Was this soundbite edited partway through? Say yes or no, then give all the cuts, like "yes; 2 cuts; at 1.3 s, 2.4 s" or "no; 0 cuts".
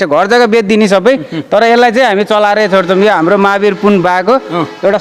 no; 0 cuts